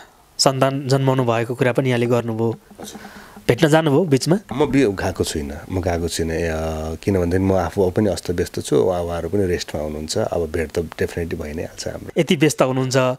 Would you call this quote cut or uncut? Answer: cut